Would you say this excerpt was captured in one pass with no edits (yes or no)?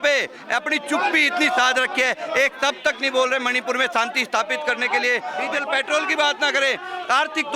no